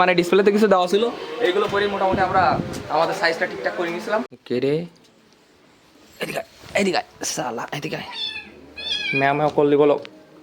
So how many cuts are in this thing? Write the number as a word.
one